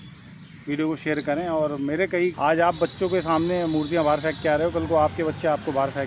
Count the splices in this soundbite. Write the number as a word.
one